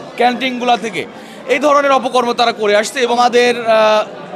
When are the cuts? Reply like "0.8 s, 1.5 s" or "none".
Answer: 3.2 s